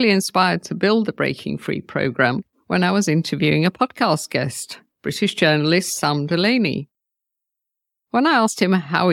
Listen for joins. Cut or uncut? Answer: cut